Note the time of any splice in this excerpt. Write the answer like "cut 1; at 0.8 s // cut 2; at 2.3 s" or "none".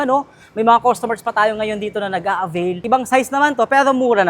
cut 1; at 2.8 s